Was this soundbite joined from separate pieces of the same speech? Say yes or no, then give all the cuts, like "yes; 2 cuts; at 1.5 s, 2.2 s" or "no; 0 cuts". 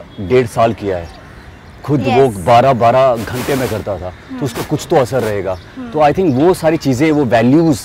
no; 0 cuts